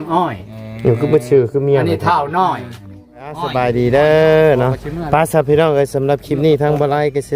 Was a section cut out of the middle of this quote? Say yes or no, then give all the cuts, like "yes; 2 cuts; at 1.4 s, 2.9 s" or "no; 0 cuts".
yes; 1 cut; at 3.5 s